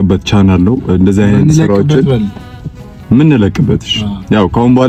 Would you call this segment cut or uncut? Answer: uncut